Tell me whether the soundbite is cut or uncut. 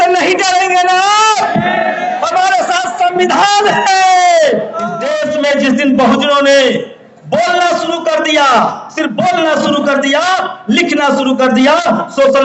cut